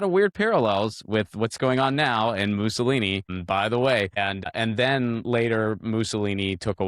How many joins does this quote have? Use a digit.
2